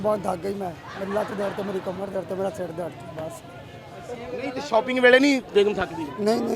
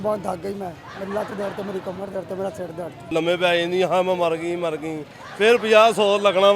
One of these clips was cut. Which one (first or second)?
second